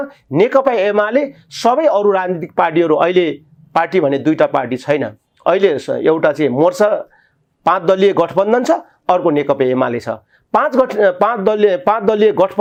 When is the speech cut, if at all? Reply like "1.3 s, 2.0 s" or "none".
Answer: none